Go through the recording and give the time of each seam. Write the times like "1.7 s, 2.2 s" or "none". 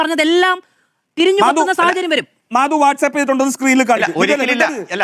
2.6 s